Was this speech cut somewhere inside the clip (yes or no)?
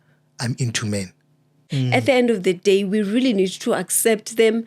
yes